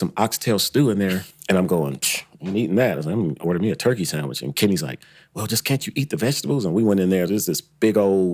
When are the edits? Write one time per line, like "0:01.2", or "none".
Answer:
0:01.3

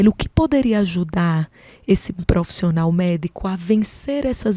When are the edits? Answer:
none

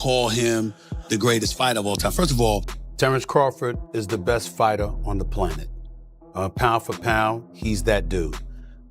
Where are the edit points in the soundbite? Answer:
0:02.8

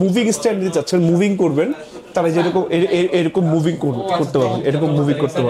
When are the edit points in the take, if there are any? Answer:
none

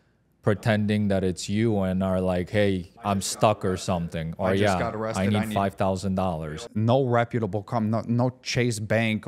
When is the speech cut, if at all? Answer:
0:06.4

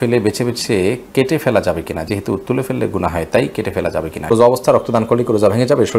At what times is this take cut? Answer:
0:04.3

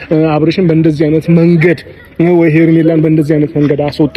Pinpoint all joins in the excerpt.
none

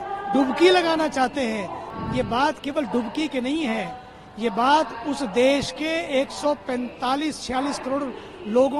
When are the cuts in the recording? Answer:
0:01.8

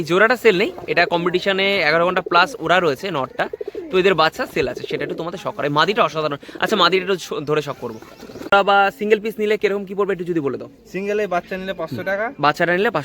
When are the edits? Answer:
0:08.5

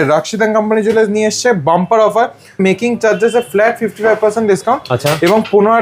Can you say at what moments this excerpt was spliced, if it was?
0:02.6

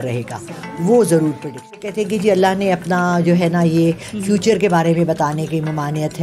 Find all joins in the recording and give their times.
0:01.9

